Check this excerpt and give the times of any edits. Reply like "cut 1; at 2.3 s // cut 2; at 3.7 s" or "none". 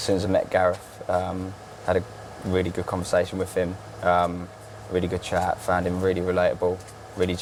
none